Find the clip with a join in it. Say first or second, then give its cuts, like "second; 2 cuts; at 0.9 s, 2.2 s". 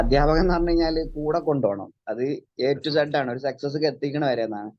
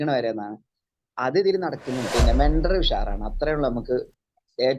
second; 1 cut; at 2.1 s